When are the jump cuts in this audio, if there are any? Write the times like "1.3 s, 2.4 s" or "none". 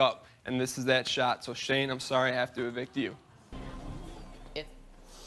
3.4 s